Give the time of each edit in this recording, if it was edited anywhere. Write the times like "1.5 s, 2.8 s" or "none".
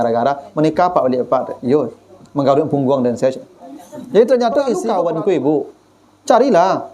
4.8 s